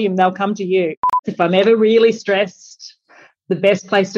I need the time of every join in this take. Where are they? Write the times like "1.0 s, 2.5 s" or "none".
1.2 s

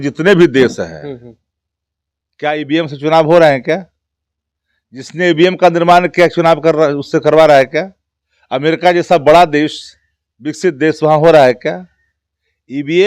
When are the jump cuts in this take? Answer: none

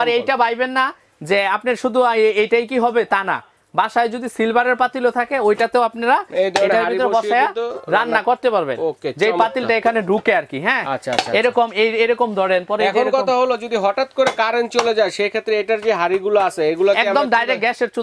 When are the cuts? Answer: none

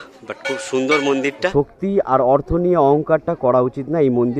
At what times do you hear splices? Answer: 1.5 s

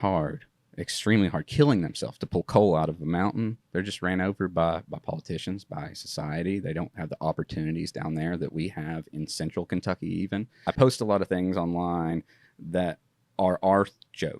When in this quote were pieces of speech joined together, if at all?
3.6 s, 10.6 s

